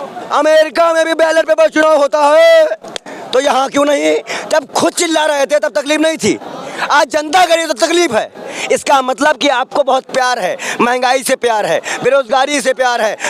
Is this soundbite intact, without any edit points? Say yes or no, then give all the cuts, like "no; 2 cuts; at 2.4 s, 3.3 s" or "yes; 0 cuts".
yes; 0 cuts